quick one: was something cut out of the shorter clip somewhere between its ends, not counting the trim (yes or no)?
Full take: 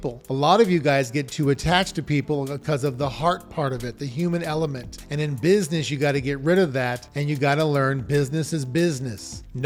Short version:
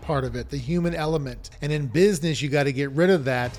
no